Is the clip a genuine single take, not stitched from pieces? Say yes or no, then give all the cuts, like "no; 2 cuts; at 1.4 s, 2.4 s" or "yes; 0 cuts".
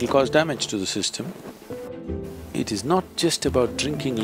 no; 1 cut; at 1.9 s